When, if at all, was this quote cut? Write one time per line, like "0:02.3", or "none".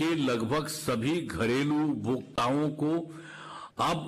none